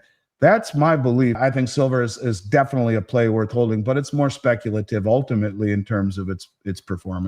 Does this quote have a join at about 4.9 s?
no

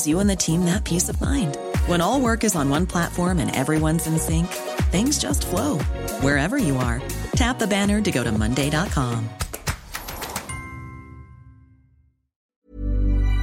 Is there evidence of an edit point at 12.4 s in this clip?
yes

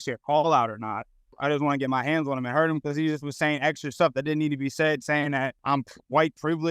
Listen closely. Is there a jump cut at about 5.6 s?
yes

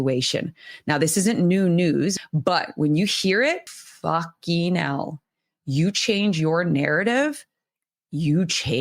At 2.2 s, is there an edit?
yes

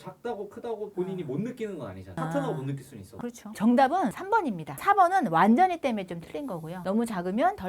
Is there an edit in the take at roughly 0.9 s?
no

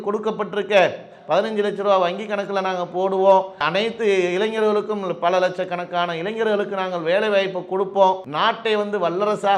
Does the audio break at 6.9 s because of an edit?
no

